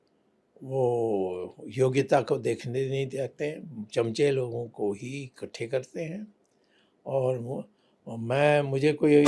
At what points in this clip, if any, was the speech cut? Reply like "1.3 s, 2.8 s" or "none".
none